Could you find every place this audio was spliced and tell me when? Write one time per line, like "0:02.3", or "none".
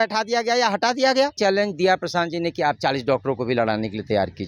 0:01.4